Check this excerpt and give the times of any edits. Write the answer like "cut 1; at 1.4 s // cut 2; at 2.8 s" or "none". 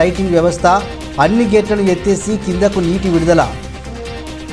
cut 1; at 3.5 s